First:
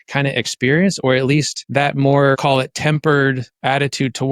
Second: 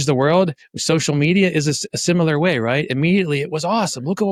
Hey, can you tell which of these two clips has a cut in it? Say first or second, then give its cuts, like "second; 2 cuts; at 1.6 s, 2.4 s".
first; 2 cuts; at 1.6 s, 2.4 s